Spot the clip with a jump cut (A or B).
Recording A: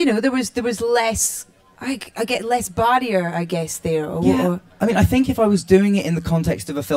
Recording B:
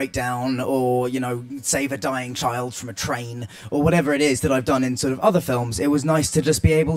B